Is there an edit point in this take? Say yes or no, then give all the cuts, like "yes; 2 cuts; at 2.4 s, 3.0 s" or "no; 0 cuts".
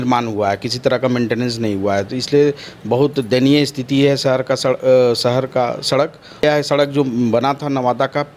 yes; 1 cut; at 6.4 s